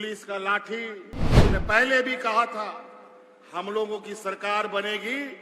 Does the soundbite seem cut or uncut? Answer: cut